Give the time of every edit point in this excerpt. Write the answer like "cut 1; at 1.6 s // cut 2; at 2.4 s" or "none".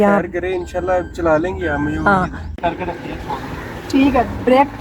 cut 1; at 2.4 s